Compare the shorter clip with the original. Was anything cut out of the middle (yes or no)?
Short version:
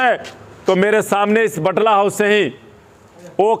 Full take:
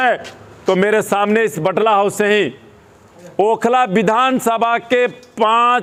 no